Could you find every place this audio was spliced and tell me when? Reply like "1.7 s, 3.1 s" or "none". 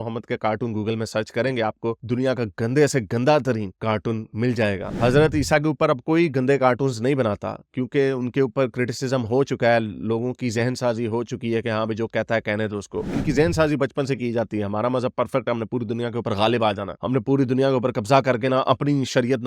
4.9 s, 13.1 s